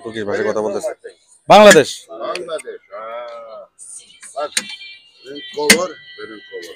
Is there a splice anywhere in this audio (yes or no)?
no